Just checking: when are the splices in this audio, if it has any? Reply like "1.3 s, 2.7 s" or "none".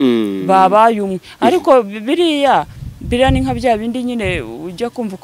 none

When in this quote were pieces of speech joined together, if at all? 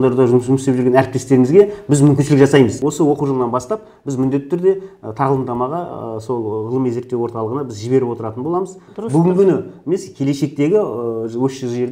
2.8 s, 8.9 s

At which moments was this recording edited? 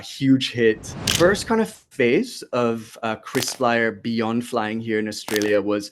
1.1 s

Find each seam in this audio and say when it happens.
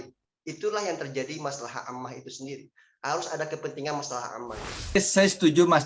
5.0 s

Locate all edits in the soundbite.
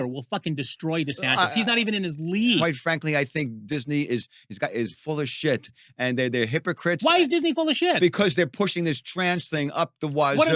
2.6 s

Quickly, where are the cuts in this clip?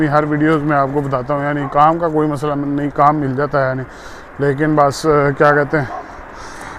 none

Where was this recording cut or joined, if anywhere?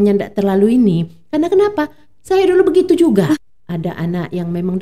3.4 s

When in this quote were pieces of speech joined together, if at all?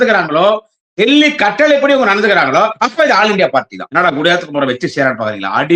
3.8 s

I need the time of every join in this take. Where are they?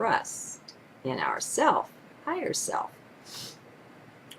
2.4 s

